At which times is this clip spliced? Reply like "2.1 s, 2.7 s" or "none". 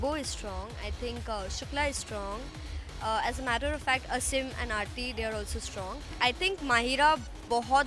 6.1 s